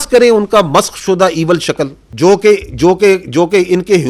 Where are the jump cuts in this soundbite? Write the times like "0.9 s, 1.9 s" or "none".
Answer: 2.0 s